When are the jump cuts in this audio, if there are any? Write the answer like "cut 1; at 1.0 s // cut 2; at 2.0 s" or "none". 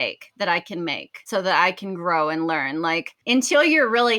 cut 1; at 1.3 s // cut 2; at 3.2 s

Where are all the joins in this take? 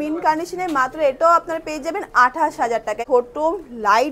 cut 1; at 3.0 s

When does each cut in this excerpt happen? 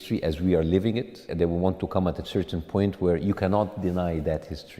none

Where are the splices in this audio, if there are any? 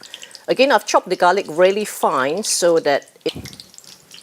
cut 1; at 3.3 s

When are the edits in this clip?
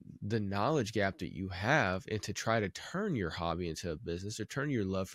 none

